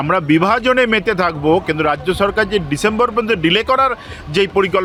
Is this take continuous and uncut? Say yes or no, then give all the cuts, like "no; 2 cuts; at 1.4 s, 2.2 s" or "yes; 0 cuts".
yes; 0 cuts